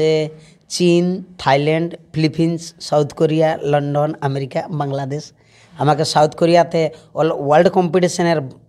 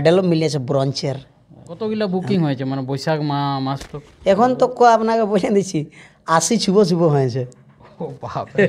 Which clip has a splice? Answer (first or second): second